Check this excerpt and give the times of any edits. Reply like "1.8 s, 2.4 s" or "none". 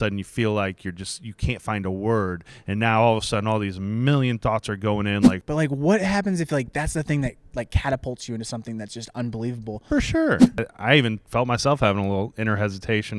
5.4 s, 10.5 s